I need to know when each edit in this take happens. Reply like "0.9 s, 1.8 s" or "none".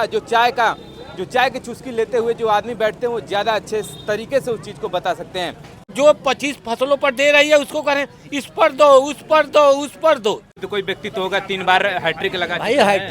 5.9 s, 10.5 s